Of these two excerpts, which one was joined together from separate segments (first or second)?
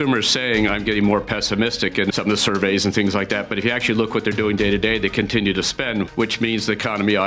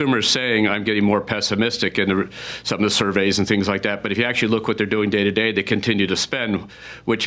first